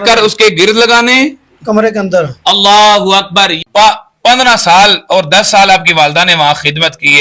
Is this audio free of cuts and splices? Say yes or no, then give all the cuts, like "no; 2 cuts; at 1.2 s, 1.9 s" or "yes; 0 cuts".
no; 1 cut; at 3.6 s